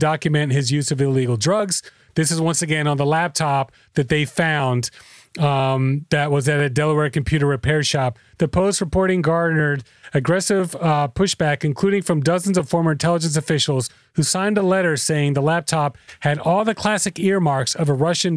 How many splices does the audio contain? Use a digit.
0